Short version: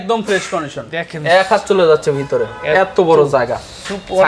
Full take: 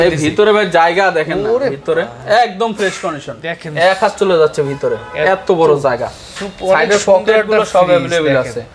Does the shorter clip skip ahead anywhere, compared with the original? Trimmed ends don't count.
no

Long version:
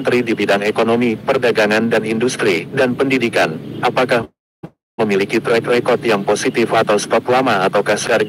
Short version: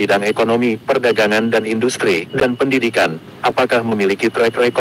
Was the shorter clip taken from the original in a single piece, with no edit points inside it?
no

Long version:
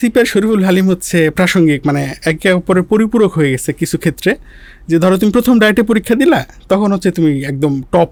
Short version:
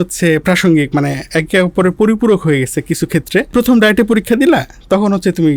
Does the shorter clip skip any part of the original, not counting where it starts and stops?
yes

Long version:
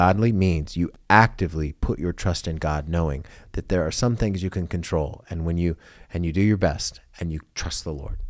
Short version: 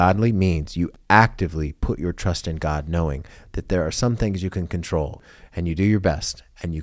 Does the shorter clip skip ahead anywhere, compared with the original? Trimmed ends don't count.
yes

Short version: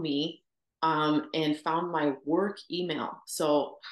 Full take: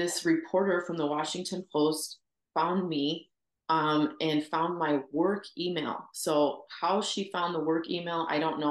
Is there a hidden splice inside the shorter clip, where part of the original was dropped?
no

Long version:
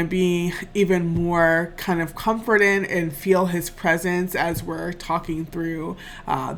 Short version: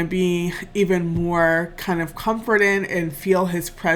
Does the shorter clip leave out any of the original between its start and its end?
no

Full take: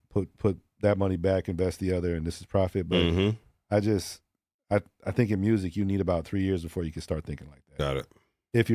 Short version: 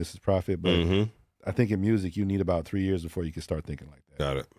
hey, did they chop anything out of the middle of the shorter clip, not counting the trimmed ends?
yes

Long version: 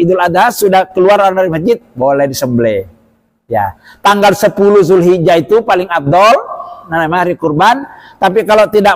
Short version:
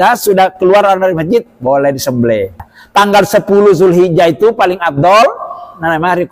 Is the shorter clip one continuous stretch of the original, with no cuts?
no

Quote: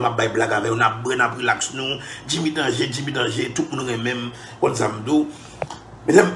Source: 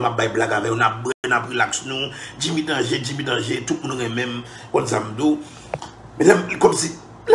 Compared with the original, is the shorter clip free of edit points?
no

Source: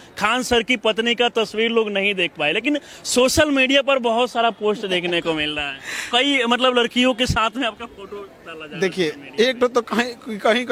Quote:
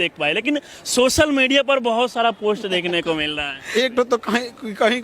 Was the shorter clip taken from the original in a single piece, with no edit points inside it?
no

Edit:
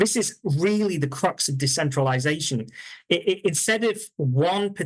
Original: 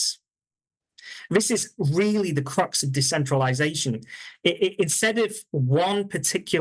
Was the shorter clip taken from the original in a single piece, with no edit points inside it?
yes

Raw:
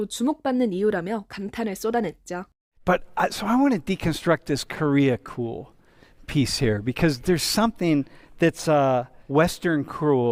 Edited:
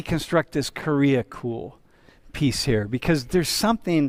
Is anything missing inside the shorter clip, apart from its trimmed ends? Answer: no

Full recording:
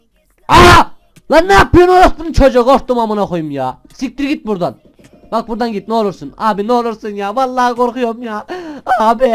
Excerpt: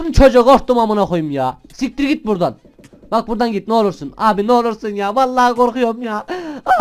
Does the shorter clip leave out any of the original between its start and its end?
no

